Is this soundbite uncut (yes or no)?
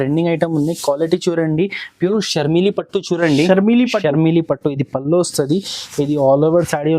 no